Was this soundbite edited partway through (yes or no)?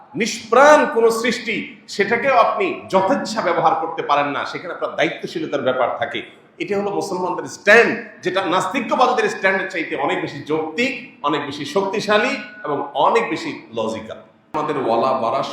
yes